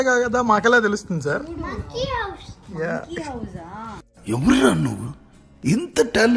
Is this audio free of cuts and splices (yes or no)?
yes